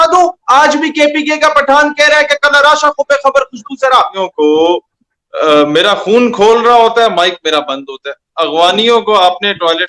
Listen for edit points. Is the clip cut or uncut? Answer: cut